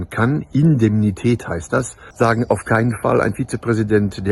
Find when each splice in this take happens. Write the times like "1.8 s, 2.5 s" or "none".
2.0 s